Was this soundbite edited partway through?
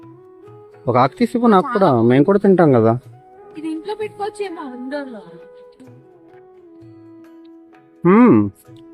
yes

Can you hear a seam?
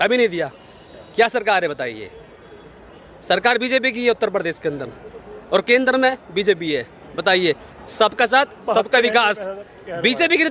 no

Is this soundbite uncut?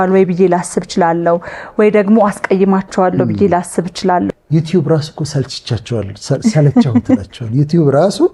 no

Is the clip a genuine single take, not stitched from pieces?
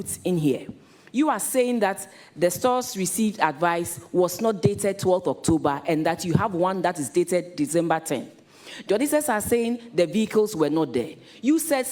yes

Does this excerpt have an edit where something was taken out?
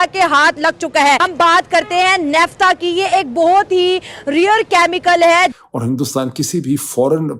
yes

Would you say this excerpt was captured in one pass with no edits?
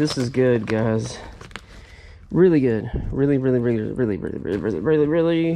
yes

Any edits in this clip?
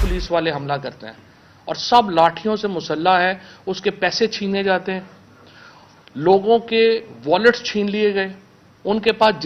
no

